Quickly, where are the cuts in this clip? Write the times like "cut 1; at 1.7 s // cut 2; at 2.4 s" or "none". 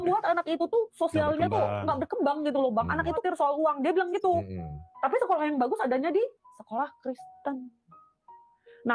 cut 1; at 3.2 s